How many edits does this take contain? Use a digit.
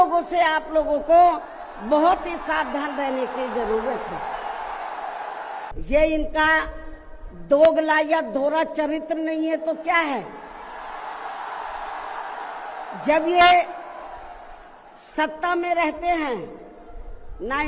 1